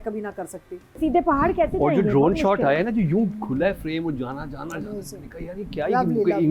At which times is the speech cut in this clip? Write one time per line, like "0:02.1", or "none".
0:01.0